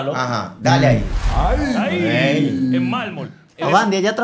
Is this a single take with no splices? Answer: no; 1 cut; at 1.2 s

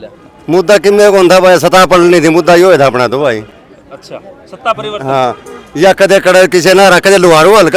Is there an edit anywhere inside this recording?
no; 0 cuts

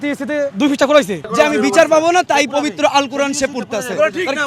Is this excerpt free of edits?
no; 1 cut; at 1.2 s

